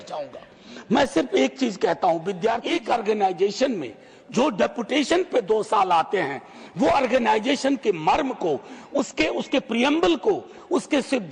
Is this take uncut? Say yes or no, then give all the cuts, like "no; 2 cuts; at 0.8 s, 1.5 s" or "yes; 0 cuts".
no; 1 cut; at 2.6 s